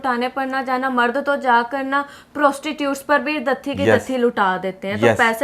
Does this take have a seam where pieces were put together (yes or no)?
no